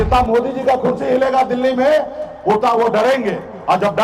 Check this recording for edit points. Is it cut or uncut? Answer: uncut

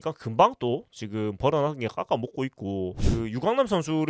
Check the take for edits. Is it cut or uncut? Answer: cut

